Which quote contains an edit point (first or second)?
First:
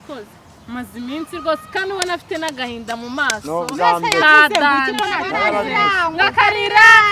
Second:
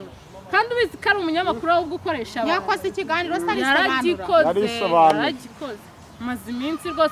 first